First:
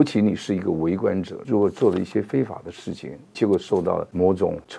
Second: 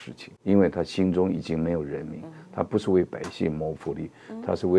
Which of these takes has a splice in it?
first; 1 cut; at 1.3 s

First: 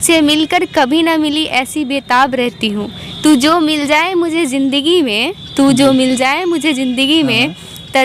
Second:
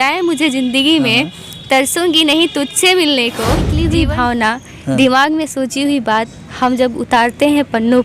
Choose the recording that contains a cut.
second; 1 cut; at 3.7 s

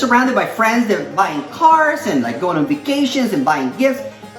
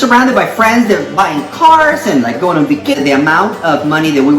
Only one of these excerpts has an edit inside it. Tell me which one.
second; 1 cut; at 3.0 s

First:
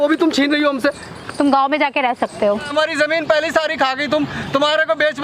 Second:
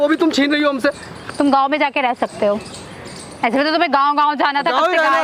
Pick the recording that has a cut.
first; 1 cut; at 2.7 s

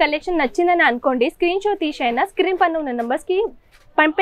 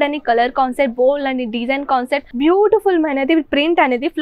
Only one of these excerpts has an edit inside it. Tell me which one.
second; 1 cut; at 2.2 s

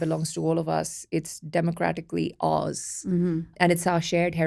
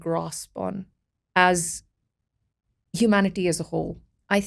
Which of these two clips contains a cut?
first; 1 cut; at 3.5 s

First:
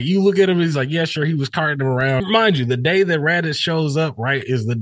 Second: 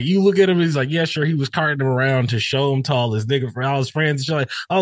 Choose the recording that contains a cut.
first; 1 cut; at 2.2 s

